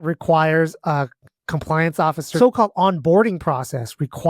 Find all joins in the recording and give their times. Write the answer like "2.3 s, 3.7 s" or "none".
2.3 s